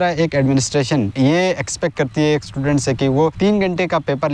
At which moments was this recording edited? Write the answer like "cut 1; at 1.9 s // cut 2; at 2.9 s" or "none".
cut 1; at 1.1 s // cut 2; at 3.3 s